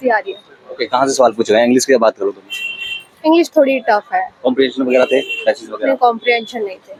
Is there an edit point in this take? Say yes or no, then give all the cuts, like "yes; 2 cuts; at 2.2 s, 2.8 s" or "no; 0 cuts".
no; 0 cuts